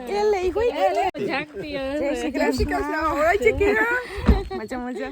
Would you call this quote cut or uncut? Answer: cut